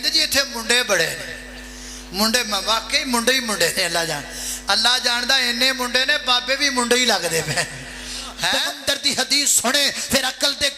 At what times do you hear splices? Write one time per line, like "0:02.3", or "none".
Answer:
0:08.7